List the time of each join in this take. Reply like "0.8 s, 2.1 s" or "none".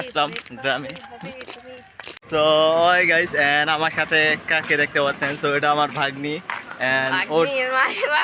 none